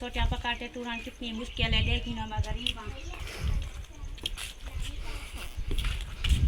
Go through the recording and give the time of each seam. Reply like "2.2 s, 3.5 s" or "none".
none